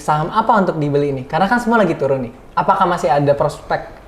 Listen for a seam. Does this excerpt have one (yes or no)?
no